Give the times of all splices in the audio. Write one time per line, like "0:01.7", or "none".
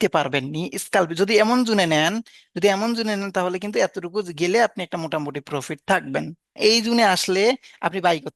0:06.5